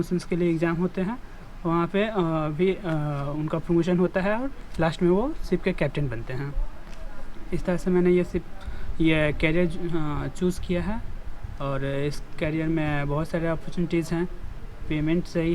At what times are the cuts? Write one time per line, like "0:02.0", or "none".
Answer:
none